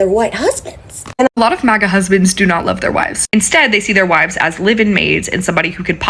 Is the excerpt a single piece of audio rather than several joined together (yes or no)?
no